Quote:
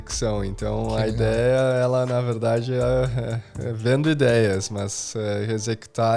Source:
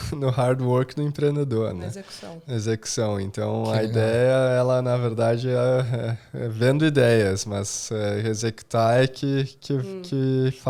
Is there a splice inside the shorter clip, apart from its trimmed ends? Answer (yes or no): no